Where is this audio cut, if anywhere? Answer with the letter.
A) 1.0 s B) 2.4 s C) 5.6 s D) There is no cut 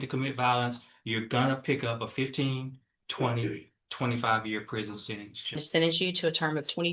C